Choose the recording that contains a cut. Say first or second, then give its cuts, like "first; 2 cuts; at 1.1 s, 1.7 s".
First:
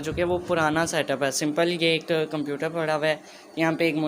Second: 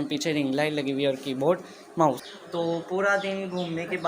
second; 1 cut; at 2.2 s